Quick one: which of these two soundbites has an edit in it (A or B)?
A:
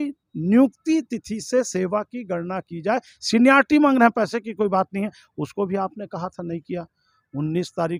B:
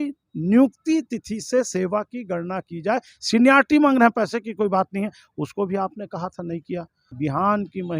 B